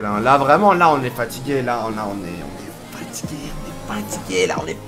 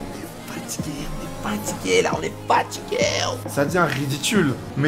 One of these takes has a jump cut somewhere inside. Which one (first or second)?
second